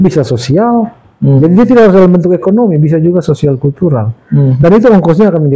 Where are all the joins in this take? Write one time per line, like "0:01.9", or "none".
none